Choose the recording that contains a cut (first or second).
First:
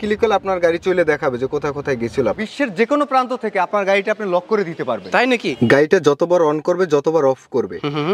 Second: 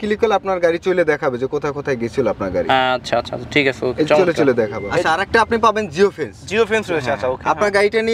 first